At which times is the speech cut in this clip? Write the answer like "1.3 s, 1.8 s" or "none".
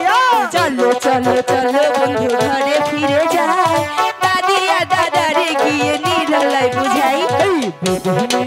none